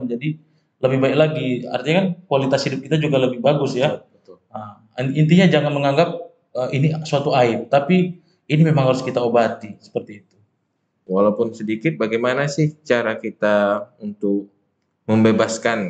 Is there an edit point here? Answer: yes; 1 cut; at 11.0 s

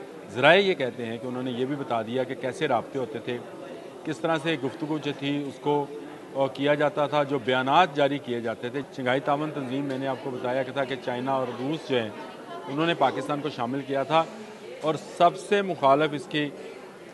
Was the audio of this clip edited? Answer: yes; 1 cut; at 8.9 s

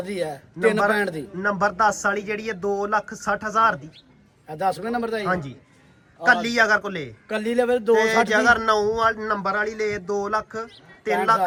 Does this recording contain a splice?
no; 0 cuts

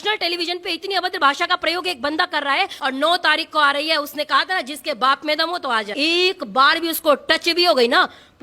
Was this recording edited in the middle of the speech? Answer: yes; 2 cuts; at 2.7 s, 5.9 s

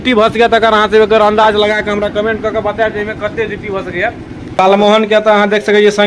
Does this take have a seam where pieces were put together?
yes; 1 cut; at 4.6 s

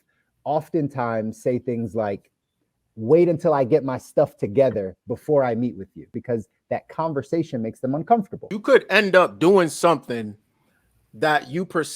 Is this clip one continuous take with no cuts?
no; 2 cuts; at 6.1 s, 8.4 s

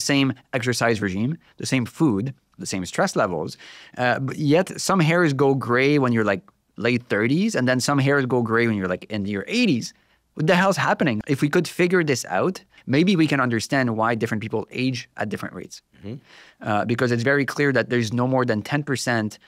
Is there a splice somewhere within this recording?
yes; 2 cuts; at 11.2 s, 12.7 s

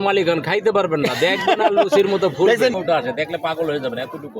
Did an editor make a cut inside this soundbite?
yes; 1 cut; at 2.8 s

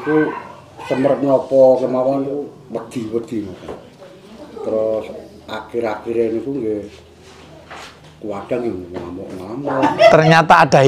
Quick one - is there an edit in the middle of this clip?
yes; 1 cut; at 9.8 s

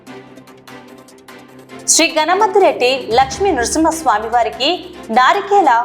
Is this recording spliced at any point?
yes; 1 cut; at 1.9 s

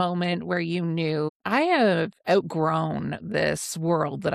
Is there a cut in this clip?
no; 0 cuts

